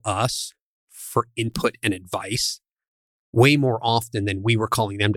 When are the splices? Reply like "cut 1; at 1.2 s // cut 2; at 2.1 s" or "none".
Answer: none